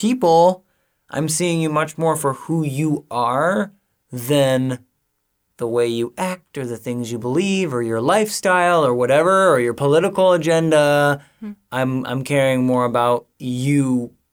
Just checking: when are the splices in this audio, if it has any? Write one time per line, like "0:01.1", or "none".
none